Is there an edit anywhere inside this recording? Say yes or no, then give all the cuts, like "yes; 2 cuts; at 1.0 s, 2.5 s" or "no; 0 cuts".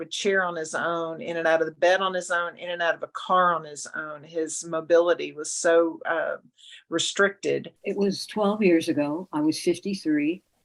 yes; 1 cut; at 7.8 s